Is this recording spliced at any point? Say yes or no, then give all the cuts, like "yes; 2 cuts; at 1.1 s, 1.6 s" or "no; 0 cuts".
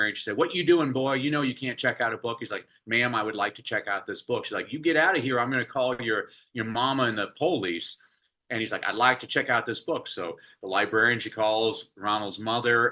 no; 0 cuts